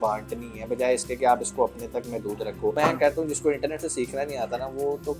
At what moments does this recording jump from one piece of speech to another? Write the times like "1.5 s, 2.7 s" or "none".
2.8 s